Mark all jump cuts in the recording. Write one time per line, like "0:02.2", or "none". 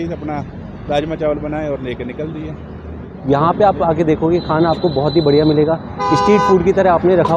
0:03.1